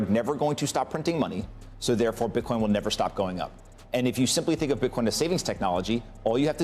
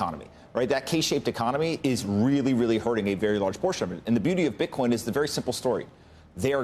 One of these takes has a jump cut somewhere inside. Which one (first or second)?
first